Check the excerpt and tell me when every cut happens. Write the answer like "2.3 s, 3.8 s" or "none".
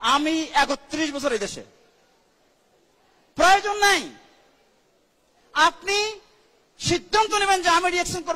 none

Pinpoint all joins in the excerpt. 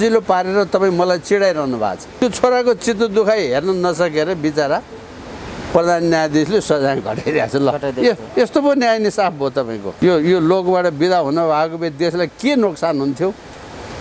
2.0 s, 9.8 s

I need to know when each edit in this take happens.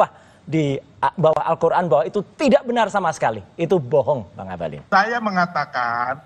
4.8 s

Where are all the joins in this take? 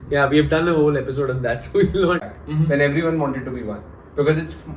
2.2 s

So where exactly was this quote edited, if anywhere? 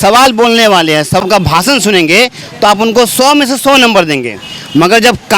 1.2 s

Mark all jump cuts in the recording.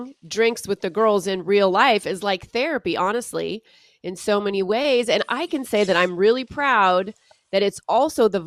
none

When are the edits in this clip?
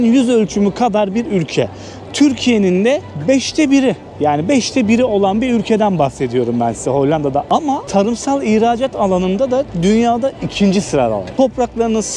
none

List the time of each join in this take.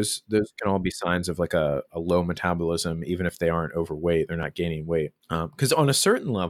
5.2 s

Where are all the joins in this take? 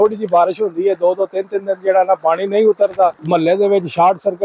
3.2 s

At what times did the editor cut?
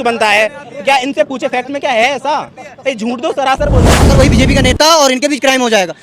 4.1 s

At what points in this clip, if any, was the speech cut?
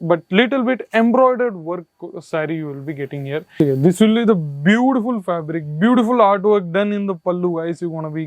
3.5 s

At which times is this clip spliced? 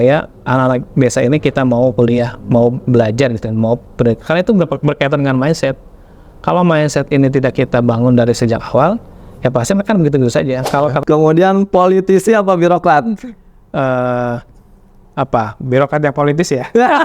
11.0 s

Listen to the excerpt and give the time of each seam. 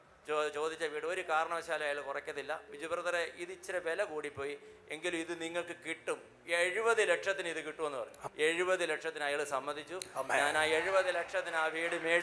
2.7 s, 8.2 s

